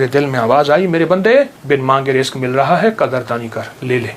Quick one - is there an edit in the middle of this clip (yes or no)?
yes